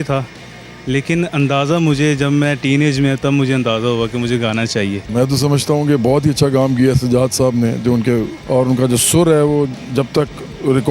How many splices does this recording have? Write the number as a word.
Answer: two